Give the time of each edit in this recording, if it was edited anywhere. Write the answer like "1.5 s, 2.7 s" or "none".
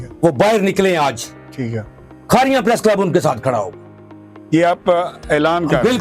none